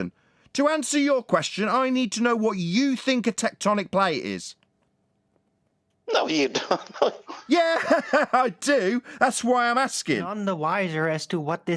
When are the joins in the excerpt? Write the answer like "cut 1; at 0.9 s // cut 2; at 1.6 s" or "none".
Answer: cut 1; at 10.3 s